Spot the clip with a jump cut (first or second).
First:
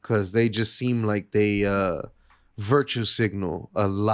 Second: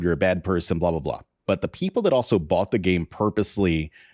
second